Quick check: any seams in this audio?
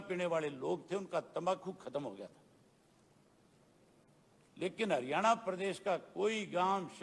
no; 0 cuts

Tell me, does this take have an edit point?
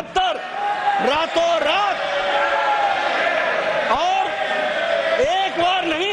no; 0 cuts

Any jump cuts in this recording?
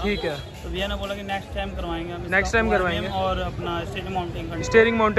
no; 0 cuts

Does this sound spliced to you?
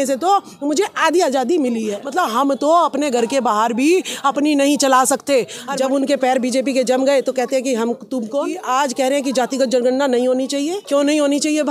yes; 4 cuts; at 2.0 s, 5.6 s, 8.6 s, 10.8 s

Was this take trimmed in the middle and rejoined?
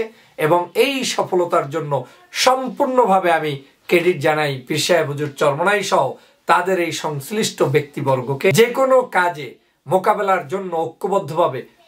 yes; 1 cut; at 8.5 s

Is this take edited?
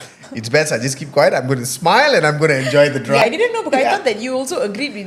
yes; 1 cut; at 3.2 s

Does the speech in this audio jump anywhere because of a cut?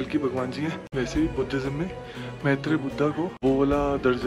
yes; 2 cuts; at 0.8 s, 3.3 s

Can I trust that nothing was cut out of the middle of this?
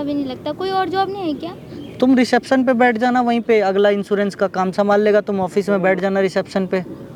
yes; 0 cuts

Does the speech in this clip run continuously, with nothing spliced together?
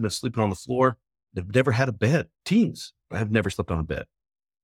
no; 2 cuts; at 2.3 s, 3.5 s

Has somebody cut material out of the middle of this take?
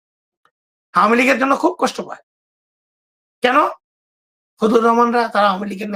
no; 0 cuts

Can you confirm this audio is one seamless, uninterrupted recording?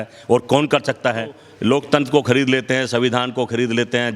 no; 1 cut; at 1.5 s

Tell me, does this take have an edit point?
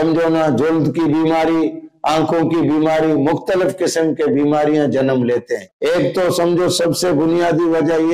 yes; 1 cut; at 5.6 s

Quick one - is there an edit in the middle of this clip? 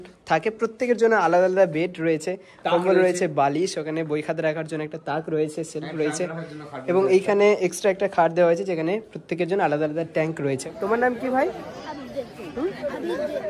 yes; 1 cut; at 10.7 s

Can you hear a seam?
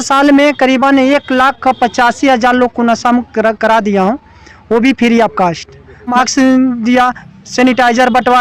yes; 1 cut; at 6.1 s

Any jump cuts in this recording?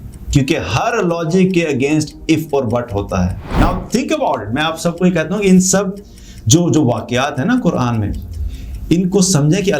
yes; 1 cut; at 3.5 s

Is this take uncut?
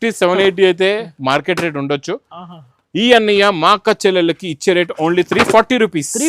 yes; 0 cuts

